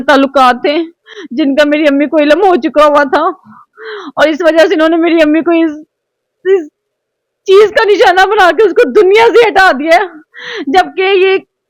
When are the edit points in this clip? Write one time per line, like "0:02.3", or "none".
none